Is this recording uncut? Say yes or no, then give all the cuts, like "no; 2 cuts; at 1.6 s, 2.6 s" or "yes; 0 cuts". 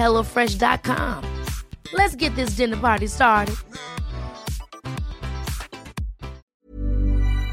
no; 1 cut; at 6.5 s